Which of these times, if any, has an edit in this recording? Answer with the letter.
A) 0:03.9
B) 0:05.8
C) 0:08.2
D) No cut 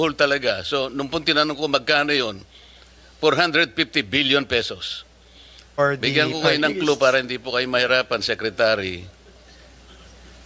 B